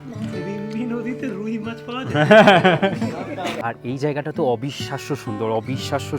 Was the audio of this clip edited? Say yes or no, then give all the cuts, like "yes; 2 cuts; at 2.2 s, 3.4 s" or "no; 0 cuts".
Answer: yes; 1 cut; at 3.6 s